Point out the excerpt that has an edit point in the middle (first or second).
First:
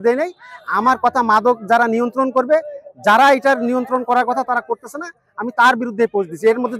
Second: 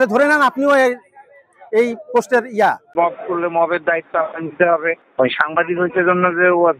second